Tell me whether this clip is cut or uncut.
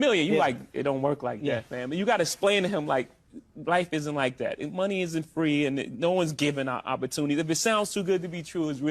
uncut